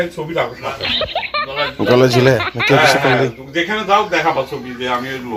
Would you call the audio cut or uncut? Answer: uncut